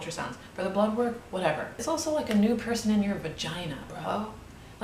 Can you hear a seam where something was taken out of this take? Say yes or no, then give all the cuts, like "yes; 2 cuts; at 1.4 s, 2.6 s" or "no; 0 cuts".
yes; 1 cut; at 1.8 s